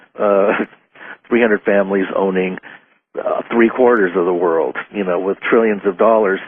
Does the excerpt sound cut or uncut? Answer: uncut